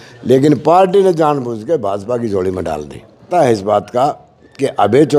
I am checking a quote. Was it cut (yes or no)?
yes